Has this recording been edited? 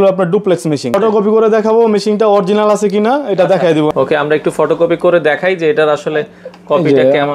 yes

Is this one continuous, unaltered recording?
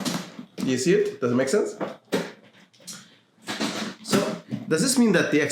yes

